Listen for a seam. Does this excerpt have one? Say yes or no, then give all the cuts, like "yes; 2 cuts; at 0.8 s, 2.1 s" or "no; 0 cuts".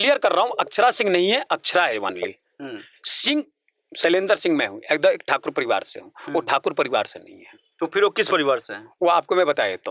no; 0 cuts